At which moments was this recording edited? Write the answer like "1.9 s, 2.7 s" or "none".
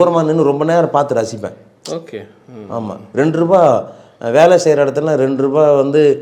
none